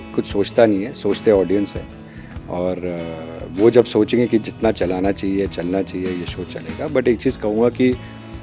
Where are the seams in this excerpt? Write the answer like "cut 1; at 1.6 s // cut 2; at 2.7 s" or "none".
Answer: none